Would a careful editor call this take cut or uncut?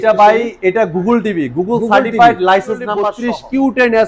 cut